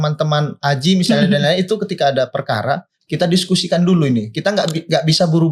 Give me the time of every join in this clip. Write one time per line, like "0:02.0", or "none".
none